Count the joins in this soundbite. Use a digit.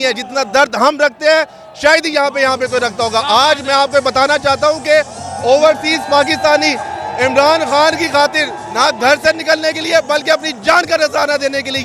0